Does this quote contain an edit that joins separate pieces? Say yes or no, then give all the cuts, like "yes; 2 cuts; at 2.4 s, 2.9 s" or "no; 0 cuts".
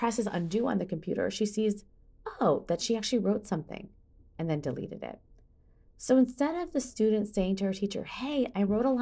no; 0 cuts